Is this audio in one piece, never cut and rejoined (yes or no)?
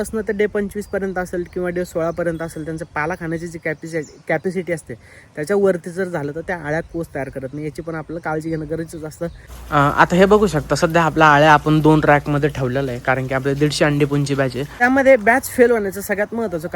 no